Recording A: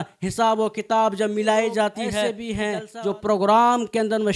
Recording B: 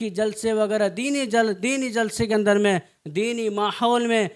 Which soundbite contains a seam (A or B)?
A